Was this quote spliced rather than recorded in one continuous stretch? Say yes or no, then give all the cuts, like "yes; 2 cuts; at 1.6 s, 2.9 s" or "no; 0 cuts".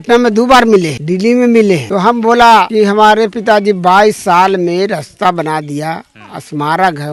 no; 0 cuts